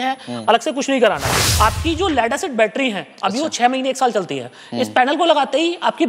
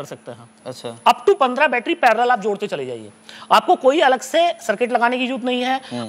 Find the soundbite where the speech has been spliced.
first; 1 cut; at 1.5 s

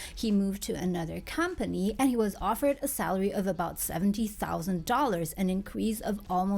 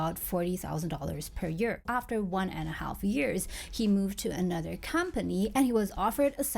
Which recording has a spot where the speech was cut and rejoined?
second; 1 cut; at 1.8 s

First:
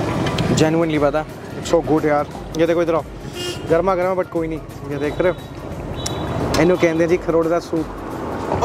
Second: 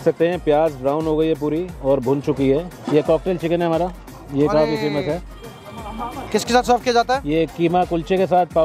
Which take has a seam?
second; 2 cuts; at 2.8 s, 6.2 s

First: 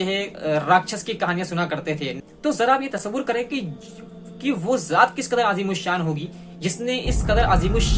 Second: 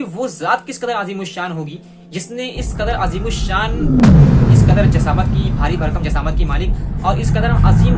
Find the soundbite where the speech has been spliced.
first; 1 cut; at 2.1 s

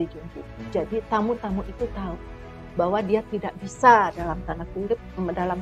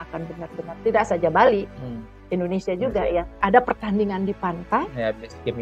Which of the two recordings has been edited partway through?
second; 1 cut; at 3.4 s

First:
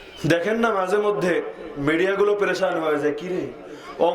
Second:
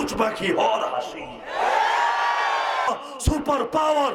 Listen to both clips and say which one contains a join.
second; 1 cut; at 2.9 s

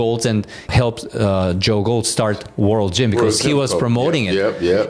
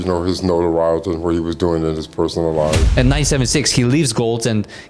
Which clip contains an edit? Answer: second; 1 cut; at 2.9 s

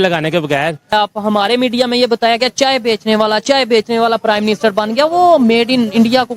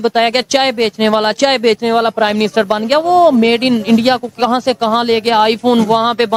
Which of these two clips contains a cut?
first; 1 cut; at 0.9 s

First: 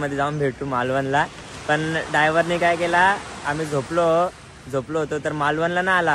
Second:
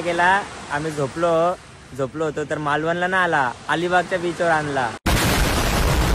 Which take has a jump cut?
second; 1 cut; at 5.0 s

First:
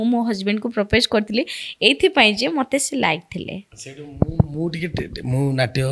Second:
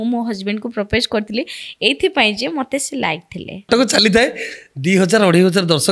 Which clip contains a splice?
second; 1 cut; at 3.6 s

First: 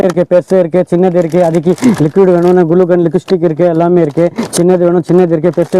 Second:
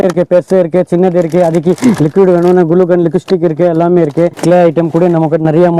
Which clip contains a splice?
second; 1 cut; at 4.4 s

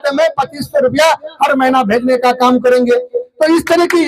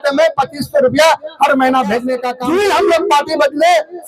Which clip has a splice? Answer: second; 1 cut; at 2.2 s

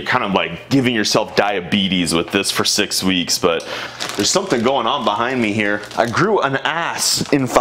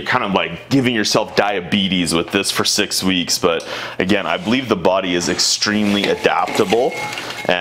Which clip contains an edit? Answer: first; 2 cuts; at 3.8 s, 5.9 s

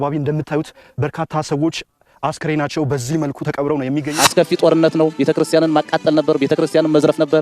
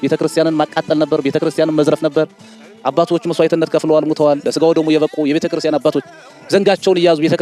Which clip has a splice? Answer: first; 1 cut; at 4.1 s

